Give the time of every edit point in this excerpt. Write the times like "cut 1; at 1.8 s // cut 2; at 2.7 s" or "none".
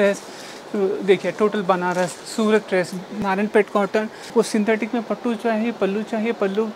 cut 1; at 3.2 s // cut 2; at 4.3 s